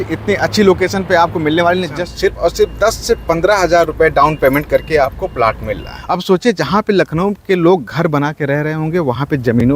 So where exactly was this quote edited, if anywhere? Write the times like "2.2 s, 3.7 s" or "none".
2.0 s, 6.1 s